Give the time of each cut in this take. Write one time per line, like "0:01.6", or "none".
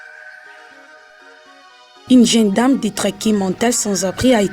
0:01.8